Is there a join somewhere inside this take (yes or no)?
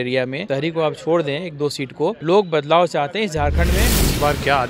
yes